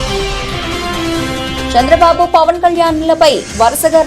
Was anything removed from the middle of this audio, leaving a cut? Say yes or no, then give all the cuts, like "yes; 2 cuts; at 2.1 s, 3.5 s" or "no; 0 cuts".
yes; 1 cut; at 1.7 s